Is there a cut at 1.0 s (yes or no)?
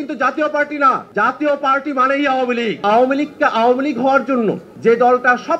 yes